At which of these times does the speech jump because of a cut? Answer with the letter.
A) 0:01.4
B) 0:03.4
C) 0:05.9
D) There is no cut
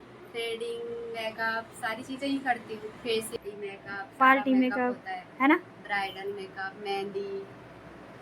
B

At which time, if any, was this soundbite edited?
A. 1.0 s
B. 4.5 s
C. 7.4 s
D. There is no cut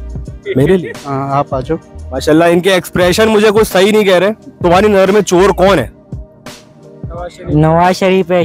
B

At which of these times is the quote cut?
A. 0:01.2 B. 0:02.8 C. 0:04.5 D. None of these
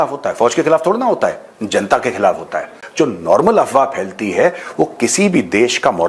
B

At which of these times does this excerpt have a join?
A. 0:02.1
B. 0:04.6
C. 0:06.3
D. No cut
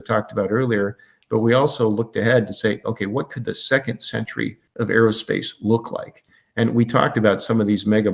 B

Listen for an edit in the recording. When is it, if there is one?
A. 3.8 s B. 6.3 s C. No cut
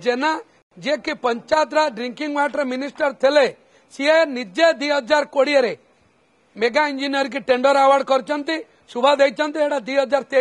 C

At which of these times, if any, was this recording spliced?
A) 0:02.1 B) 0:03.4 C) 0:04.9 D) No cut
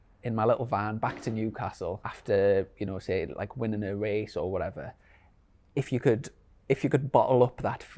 A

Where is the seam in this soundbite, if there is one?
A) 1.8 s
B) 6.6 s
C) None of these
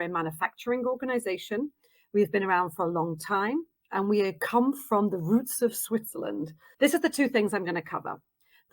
B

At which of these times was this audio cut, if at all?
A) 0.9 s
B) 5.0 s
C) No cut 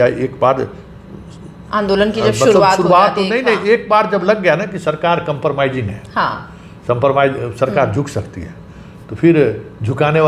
C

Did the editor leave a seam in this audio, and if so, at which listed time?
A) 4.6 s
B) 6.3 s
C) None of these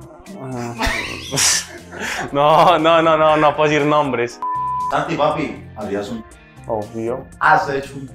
A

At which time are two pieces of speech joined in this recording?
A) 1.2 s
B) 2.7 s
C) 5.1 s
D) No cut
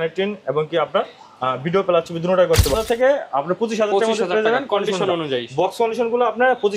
B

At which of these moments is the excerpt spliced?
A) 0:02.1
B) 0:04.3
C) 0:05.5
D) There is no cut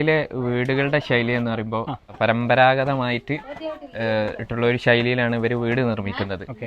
A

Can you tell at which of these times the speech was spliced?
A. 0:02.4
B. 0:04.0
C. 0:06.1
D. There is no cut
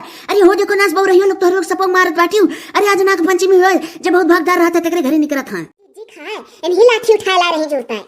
C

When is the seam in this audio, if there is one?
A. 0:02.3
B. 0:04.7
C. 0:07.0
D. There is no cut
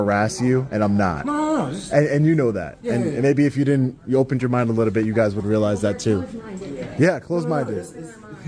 D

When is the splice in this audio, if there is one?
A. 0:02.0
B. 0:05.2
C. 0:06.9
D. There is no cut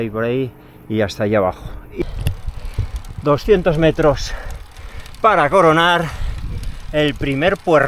A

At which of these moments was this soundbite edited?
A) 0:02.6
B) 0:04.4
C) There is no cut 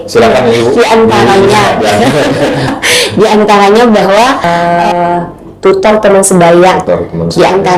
B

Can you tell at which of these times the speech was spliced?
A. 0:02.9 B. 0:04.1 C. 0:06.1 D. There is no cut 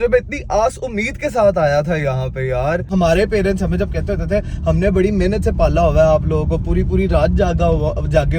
A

